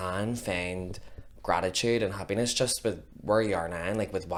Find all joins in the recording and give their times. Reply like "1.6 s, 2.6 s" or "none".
none